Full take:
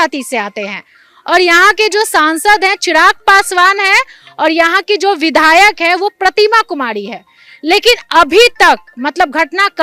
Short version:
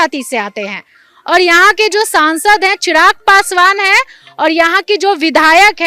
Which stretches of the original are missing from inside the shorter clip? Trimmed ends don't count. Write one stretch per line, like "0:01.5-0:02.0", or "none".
none